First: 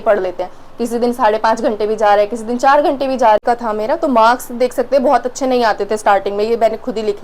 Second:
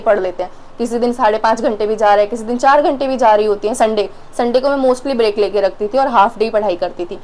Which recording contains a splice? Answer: first; 1 cut; at 3.4 s

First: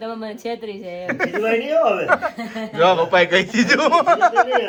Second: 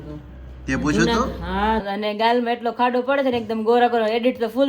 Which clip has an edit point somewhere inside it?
second; 1 cut; at 1.8 s

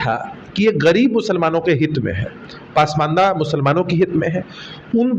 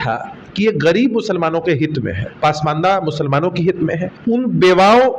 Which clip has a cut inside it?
second; 2 cuts; at 2.2 s, 4.1 s

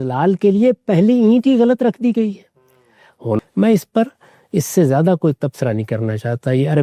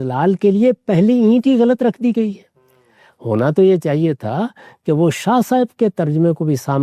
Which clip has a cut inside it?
first; 1 cut; at 3.4 s

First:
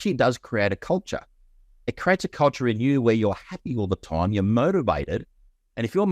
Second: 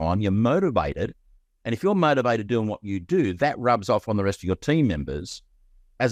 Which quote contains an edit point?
first; 1 cut; at 1.7 s

